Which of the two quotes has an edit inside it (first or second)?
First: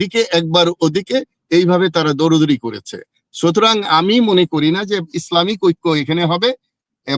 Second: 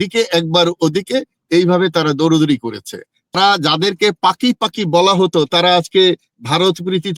second